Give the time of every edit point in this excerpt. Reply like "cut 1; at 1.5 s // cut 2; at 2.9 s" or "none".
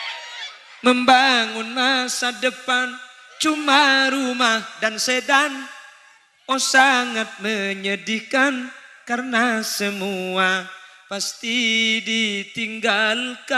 none